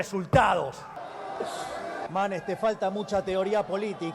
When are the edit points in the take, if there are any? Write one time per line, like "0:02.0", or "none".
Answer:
0:01.0